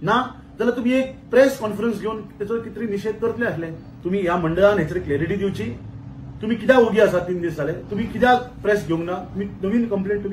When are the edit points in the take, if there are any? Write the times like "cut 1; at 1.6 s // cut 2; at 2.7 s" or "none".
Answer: cut 1; at 3.8 s